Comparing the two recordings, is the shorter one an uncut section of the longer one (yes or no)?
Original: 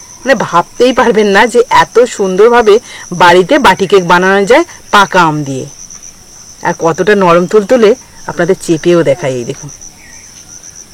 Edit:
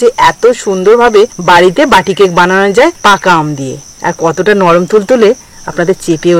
no